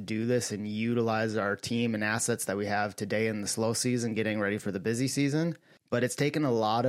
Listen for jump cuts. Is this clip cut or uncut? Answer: uncut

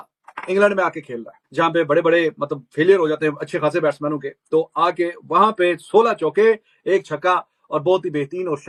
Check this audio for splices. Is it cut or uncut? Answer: uncut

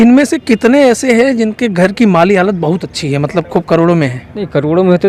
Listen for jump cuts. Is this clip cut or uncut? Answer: uncut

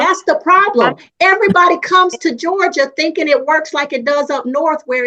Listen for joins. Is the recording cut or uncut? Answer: uncut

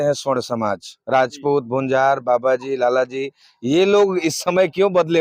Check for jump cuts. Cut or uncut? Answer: uncut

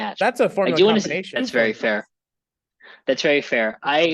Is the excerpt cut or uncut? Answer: cut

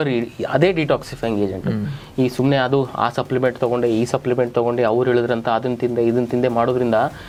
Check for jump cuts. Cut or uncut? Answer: uncut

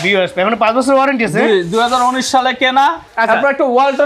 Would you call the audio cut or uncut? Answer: cut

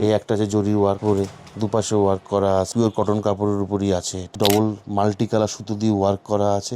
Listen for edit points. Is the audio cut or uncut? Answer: cut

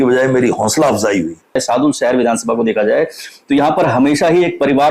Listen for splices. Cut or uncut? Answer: cut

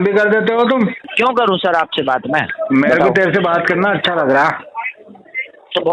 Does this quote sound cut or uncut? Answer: cut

